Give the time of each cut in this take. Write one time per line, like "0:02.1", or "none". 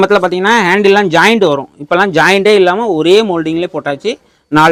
none